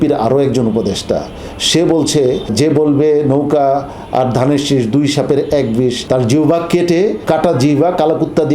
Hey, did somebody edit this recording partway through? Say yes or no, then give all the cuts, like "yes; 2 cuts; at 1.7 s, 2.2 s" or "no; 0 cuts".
yes; 3 cuts; at 2.5 s, 6.0 s, 7.2 s